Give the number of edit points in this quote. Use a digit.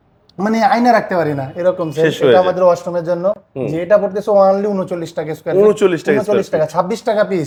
0